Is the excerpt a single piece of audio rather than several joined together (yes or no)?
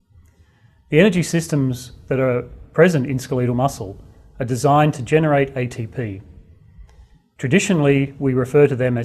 no